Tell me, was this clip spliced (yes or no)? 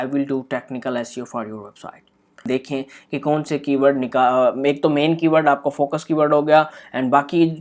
yes